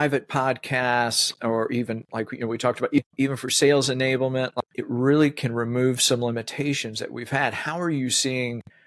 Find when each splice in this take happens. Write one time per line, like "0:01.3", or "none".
0:03.0
0:04.6